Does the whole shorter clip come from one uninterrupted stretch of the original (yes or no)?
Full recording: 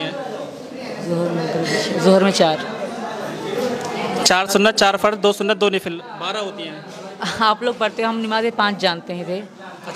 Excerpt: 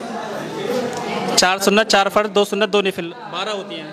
yes